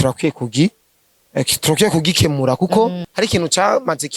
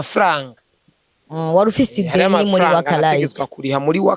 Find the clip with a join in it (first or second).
first